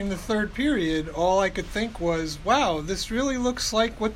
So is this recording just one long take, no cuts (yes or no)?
yes